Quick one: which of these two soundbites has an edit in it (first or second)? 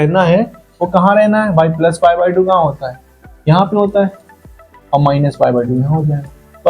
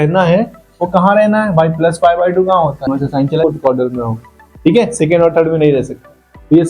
second